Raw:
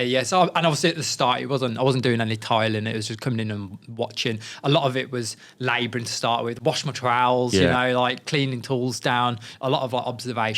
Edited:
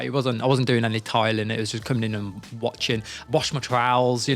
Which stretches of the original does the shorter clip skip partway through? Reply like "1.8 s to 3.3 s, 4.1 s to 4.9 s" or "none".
4.6 s to 6.5 s